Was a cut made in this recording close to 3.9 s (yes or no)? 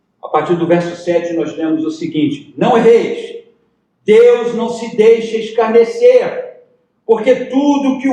no